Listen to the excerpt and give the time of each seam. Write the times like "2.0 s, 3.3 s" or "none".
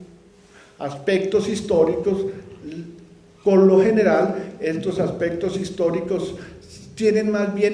none